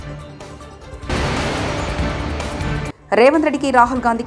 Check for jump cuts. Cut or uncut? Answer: uncut